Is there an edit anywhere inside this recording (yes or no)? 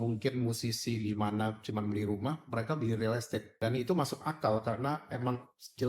yes